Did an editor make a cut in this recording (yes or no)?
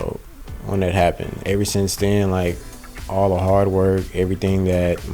yes